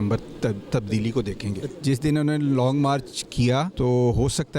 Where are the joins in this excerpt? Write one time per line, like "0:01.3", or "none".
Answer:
0:01.6
0:03.7